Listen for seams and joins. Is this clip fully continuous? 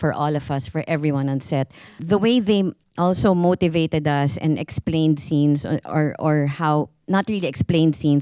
no; 1 cut; at 2.0 s

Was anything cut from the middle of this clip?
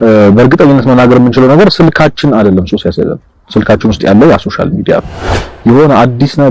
no; 0 cuts

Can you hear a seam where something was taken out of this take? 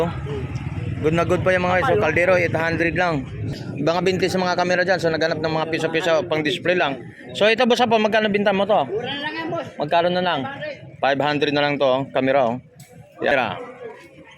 yes; 2 cuts; at 3.6 s, 13.3 s

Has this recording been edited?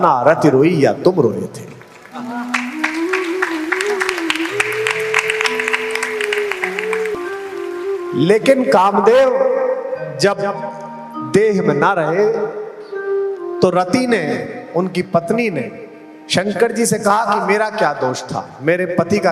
yes; 1 cut; at 7.1 s

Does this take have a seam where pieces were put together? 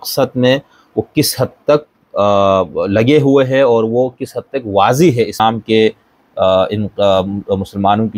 yes; 1 cut; at 5.4 s

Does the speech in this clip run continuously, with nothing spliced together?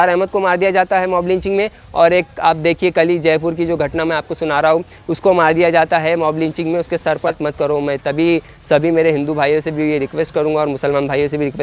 no; 1 cut; at 7.3 s

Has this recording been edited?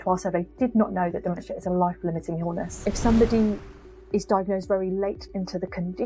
yes; 1 cut; at 2.7 s

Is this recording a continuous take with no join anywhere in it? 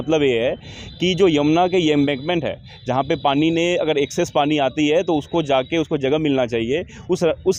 yes; 0 cuts

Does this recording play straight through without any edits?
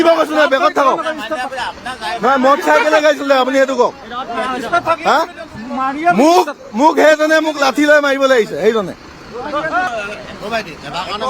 no; 1 cut; at 9.9 s

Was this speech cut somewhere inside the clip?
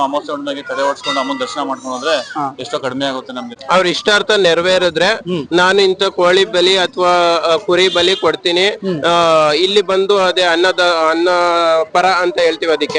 yes; 1 cut; at 3.5 s

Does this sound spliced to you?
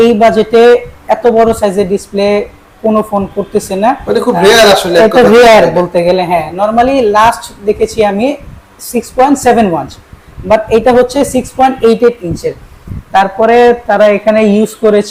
no; 0 cuts

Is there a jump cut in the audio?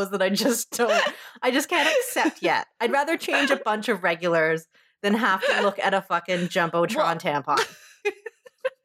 yes; 1 cut; at 7.8 s

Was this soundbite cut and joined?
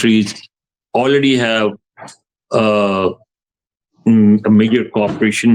no; 0 cuts

